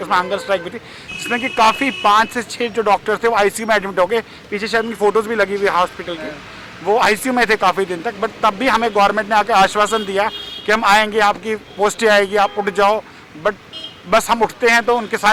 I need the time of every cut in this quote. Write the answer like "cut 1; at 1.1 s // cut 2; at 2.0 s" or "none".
none